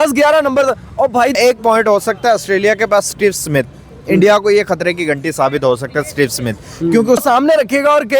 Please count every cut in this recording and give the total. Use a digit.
2